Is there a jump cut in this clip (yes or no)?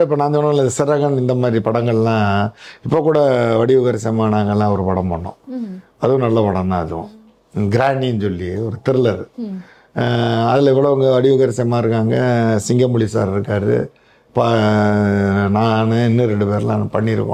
no